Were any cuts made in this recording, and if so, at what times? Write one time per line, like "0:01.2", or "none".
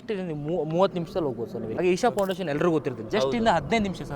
0:01.7